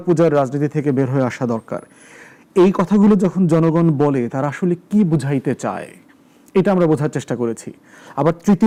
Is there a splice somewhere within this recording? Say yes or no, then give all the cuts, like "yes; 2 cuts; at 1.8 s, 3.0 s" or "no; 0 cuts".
no; 0 cuts